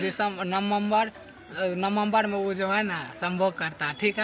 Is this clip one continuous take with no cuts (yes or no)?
yes